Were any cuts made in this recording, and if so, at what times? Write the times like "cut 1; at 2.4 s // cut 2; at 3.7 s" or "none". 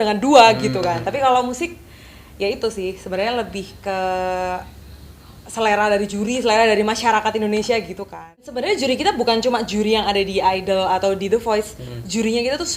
cut 1; at 8.5 s